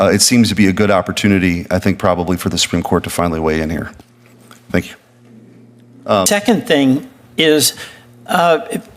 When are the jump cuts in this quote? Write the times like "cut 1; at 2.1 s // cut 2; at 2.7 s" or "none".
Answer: cut 1; at 6.3 s